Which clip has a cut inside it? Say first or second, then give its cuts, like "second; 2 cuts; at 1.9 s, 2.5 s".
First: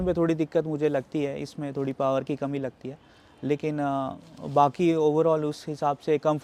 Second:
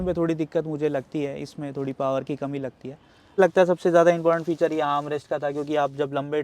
second; 1 cut; at 3.4 s